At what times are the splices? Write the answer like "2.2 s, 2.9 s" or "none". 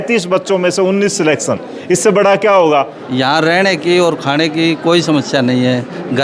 3.0 s